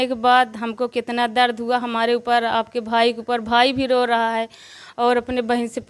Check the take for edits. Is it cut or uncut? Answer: uncut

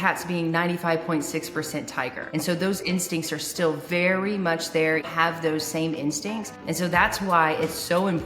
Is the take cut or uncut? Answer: cut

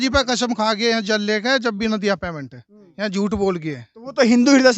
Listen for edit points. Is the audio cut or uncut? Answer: uncut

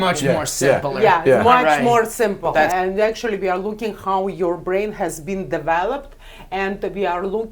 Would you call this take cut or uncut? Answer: cut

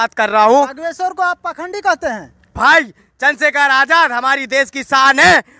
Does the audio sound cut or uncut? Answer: cut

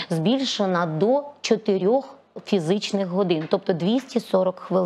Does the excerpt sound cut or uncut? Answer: uncut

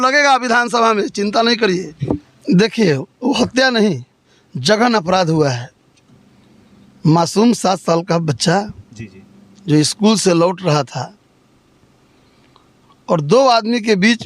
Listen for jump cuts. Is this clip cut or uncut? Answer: cut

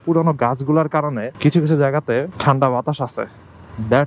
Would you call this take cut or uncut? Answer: cut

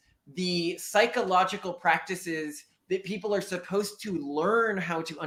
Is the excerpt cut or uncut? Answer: uncut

